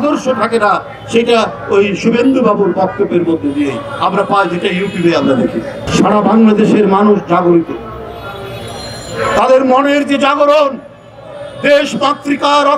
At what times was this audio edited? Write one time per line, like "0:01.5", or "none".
0:05.8